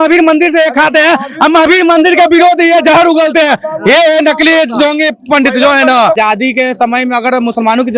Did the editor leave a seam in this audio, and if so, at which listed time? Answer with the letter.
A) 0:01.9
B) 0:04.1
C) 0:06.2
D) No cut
C